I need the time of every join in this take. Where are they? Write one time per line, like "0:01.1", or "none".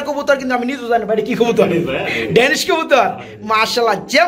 none